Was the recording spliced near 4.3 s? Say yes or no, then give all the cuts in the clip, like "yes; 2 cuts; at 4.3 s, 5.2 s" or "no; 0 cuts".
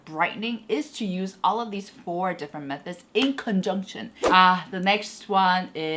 yes; 1 cut; at 4.3 s